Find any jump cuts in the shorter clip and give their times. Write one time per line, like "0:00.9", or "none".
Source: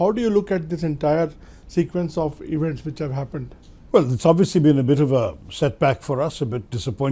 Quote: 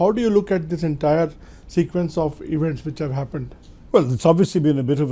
none